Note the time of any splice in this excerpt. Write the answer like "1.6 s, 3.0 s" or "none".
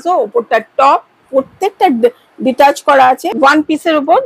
3.3 s